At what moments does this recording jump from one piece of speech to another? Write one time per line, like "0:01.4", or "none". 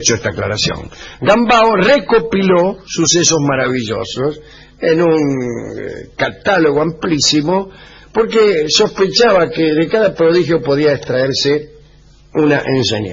none